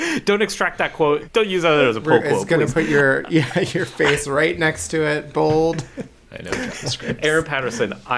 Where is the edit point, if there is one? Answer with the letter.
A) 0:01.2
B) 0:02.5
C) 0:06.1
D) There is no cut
A